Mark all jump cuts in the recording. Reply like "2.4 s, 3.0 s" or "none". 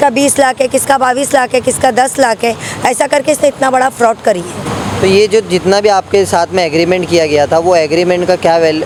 none